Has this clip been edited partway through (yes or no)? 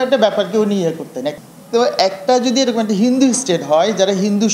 yes